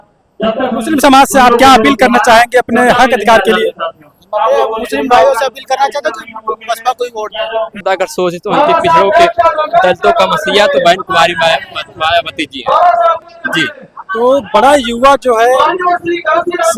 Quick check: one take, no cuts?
no; 2 cuts; at 7.8 s, 13.2 s

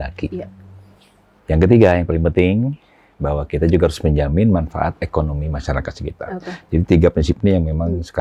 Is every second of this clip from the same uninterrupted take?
yes; 0 cuts

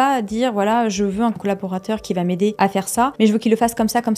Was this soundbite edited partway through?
yes; 2 cuts; at 1.4 s, 2.9 s

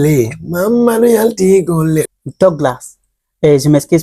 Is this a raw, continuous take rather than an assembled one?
no; 1 cut; at 2.1 s

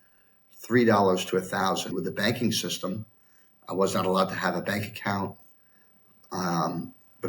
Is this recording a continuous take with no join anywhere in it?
yes; 0 cuts

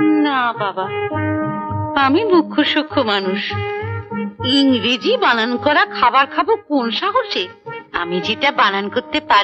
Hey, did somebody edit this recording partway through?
no; 0 cuts

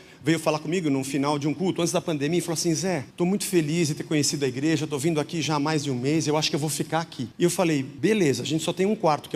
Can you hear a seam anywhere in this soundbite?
yes; 3 cuts; at 3.1 s, 7.2 s, 7.9 s

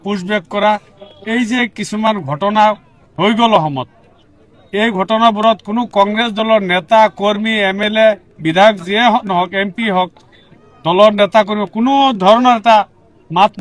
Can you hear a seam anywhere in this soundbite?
no; 0 cuts

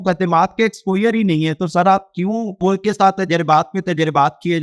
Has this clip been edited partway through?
yes; 1 cut; at 2.6 s

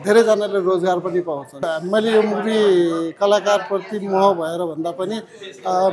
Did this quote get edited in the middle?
yes; 1 cut; at 1.7 s

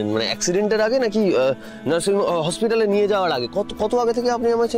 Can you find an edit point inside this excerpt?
no; 0 cuts

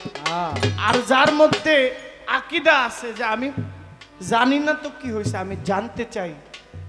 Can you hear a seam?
no; 0 cuts

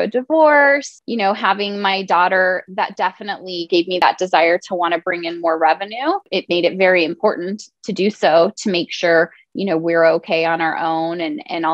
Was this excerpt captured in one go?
no; 3 cuts; at 1.0 s, 4.0 s, 6.3 s

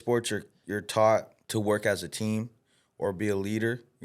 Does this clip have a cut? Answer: yes; 1 cut; at 1.4 s

